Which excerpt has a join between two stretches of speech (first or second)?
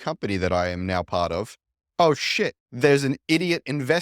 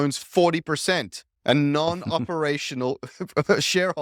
first